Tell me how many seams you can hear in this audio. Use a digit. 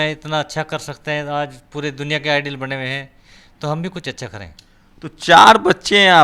0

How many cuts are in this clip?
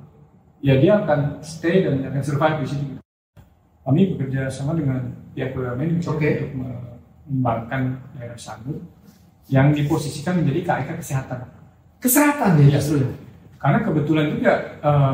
1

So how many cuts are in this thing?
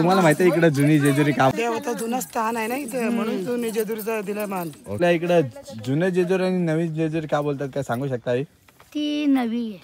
2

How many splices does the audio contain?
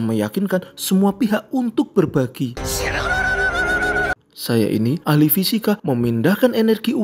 1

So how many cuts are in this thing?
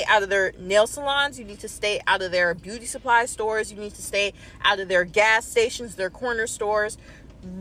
0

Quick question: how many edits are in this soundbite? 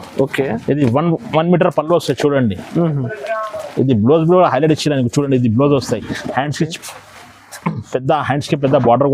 0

